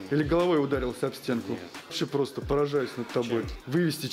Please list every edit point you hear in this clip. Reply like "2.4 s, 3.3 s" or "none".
none